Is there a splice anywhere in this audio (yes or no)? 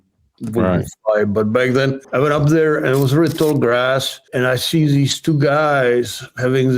yes